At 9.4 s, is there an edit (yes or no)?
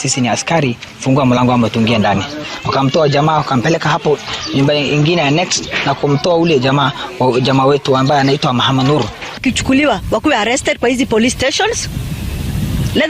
yes